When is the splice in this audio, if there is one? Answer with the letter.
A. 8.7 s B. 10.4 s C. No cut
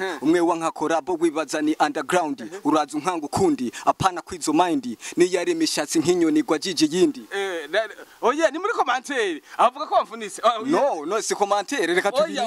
C